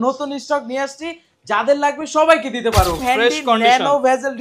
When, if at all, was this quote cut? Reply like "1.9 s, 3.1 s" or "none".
3.0 s